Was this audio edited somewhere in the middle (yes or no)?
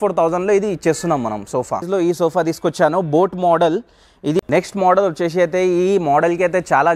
yes